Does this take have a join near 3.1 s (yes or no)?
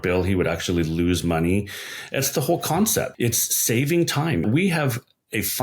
yes